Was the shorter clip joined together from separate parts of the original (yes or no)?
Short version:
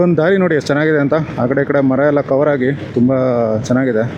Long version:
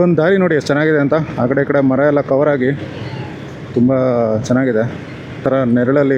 yes